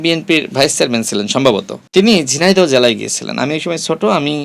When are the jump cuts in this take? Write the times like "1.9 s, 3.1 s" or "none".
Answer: 1.8 s